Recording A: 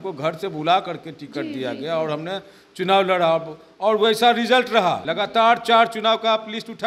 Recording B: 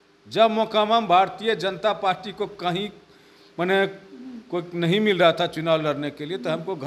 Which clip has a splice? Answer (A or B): A